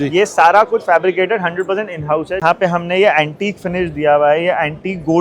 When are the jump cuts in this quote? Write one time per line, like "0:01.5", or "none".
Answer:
0:02.4